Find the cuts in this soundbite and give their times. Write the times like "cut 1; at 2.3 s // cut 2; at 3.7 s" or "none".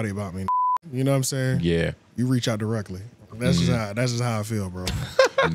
none